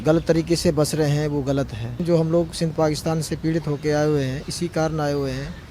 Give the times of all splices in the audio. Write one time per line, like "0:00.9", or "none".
0:02.0